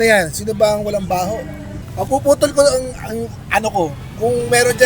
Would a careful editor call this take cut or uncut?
cut